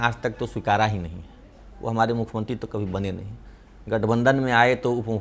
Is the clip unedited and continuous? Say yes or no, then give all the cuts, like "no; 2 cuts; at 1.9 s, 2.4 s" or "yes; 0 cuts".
yes; 0 cuts